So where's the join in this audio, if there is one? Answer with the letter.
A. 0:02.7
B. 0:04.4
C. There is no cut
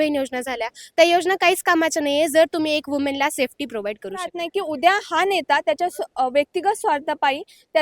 B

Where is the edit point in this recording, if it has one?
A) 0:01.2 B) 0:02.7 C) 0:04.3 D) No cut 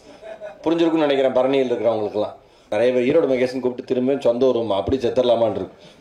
B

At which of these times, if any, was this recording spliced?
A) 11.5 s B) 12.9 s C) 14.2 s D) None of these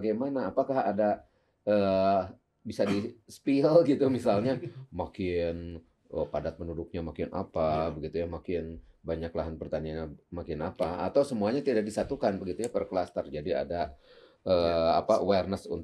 D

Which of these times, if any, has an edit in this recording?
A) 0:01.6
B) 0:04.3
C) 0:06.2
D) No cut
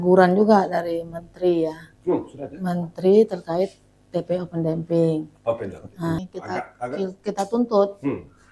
C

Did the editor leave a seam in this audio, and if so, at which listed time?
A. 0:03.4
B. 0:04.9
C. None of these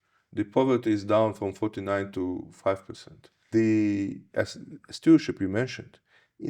A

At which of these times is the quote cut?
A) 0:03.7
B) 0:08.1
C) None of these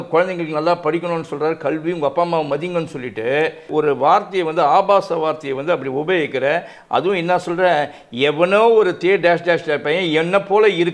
A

